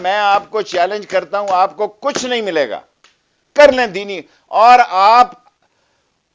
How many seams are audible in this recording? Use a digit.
0